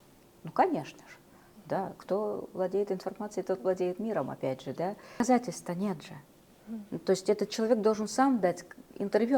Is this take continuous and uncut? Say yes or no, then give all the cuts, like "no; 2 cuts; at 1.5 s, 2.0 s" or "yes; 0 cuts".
no; 1 cut; at 5.2 s